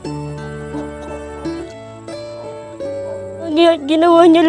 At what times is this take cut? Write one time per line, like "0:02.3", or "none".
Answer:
0:01.7
0:03.5